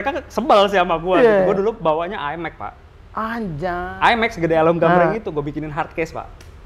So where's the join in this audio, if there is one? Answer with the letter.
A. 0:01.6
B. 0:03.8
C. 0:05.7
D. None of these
B